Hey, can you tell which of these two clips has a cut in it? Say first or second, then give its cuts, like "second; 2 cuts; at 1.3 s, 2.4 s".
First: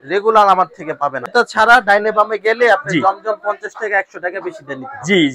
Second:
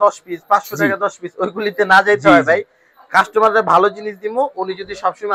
first; 1 cut; at 1.2 s